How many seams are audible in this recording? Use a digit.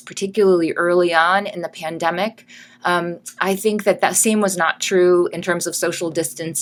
0